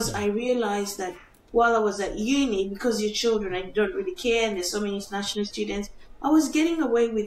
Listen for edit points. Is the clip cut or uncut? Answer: uncut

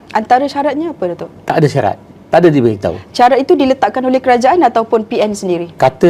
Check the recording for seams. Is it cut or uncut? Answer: uncut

